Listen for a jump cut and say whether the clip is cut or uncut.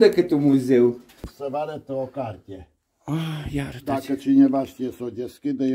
cut